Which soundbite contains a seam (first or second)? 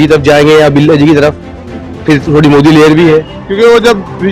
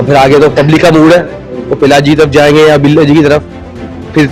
first